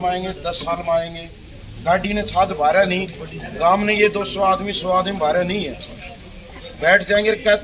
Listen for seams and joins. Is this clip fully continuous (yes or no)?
yes